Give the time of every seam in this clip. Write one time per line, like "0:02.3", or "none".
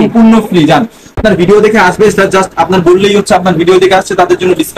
0:01.1